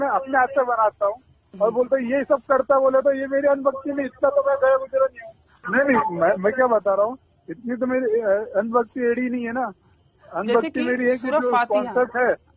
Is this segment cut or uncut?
cut